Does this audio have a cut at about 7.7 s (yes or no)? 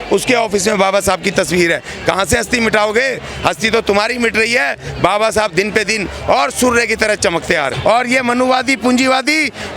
yes